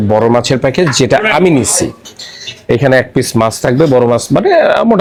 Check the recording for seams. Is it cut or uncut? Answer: uncut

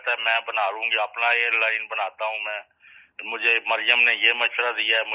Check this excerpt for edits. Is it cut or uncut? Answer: uncut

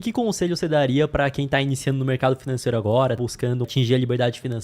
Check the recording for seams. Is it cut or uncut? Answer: cut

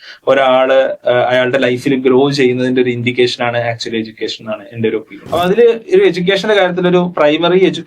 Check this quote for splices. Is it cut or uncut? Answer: cut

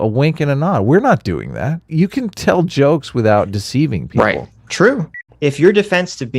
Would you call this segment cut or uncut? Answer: cut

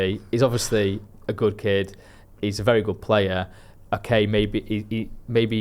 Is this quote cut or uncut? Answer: uncut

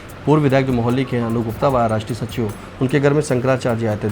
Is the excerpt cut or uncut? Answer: uncut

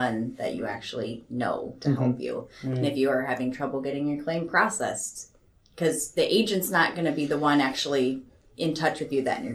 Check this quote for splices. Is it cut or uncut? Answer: uncut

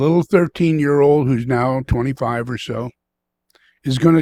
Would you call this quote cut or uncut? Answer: uncut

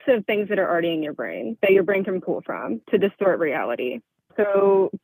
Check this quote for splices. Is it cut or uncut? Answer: cut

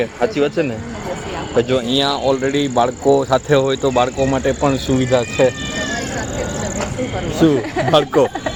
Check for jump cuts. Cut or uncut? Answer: uncut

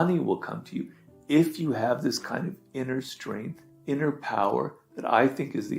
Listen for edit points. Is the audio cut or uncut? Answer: cut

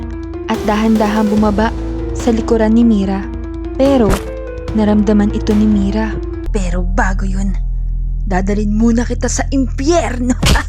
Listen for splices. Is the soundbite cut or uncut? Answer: cut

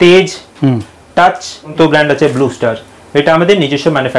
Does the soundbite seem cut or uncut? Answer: cut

